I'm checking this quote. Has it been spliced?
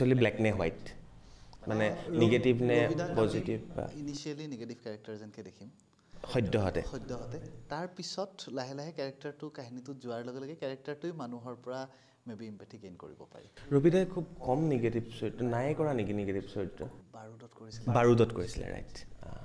no; 0 cuts

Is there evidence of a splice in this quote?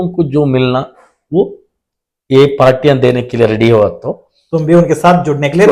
no; 0 cuts

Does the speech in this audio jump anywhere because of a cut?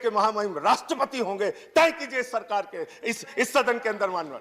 no; 0 cuts

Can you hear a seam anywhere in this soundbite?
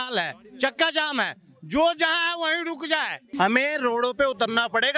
yes; 1 cut; at 3.3 s

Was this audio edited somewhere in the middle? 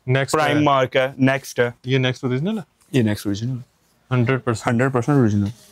no; 0 cuts

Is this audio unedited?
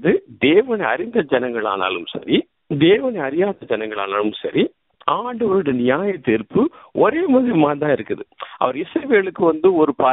no; 2 cuts; at 2.6 s, 4.9 s

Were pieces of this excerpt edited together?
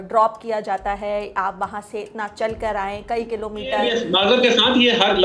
yes; 1 cut; at 4.0 s

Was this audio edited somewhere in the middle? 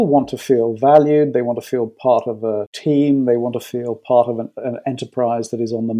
yes; 1 cut; at 2.7 s

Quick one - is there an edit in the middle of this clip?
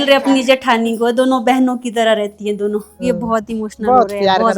yes; 1 cut; at 3.0 s

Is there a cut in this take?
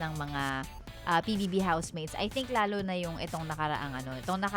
no; 0 cuts

